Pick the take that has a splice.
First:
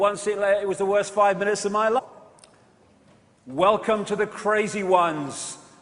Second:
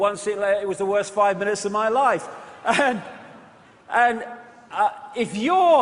second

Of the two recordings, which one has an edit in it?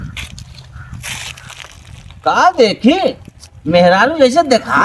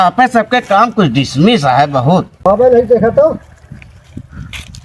second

